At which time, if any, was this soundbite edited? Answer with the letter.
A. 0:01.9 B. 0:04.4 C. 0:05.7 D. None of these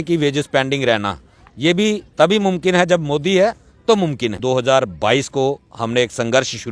B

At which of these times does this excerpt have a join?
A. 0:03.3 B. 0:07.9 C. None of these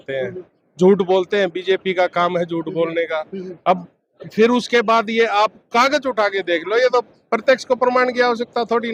C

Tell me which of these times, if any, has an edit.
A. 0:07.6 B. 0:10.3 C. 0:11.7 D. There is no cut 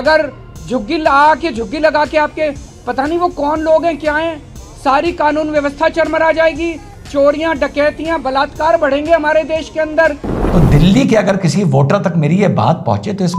B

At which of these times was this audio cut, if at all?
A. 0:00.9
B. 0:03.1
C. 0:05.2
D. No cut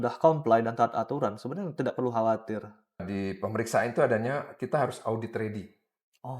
B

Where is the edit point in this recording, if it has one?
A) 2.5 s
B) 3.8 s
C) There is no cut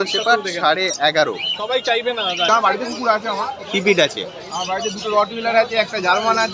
A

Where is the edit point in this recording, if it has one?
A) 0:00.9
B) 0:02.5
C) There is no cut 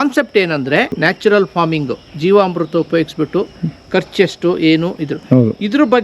A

